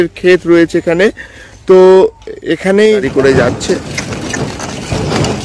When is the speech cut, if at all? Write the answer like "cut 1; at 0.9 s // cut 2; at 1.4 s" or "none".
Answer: cut 1; at 3.0 s